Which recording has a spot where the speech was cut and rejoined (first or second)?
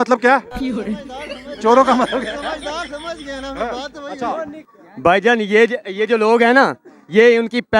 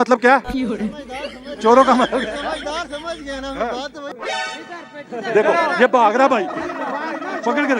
second